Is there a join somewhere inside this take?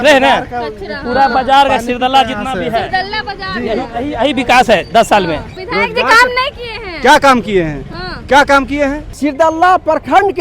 yes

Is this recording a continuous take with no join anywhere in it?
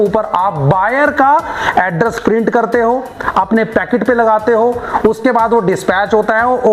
yes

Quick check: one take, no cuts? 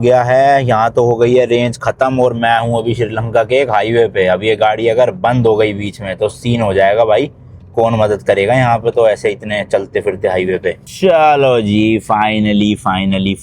no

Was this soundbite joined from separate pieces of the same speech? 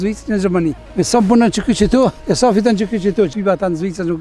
yes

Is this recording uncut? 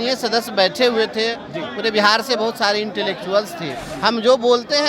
no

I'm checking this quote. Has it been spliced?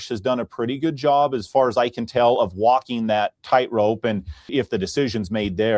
yes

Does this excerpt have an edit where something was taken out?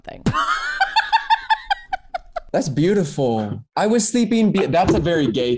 yes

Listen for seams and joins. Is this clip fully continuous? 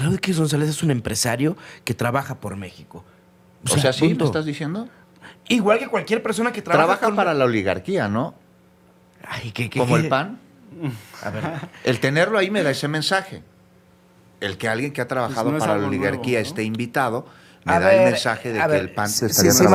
yes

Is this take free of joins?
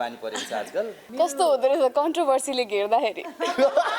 no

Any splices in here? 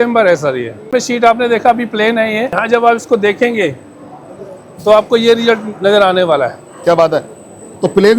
yes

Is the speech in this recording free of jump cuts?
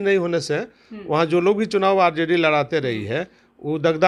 yes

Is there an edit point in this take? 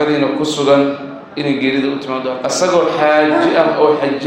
yes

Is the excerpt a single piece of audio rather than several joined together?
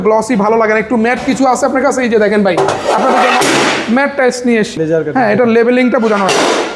no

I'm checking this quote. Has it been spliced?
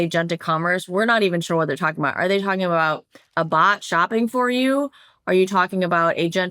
no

